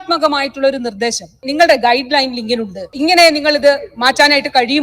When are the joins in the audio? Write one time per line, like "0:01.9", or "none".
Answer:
0:01.5
0:02.9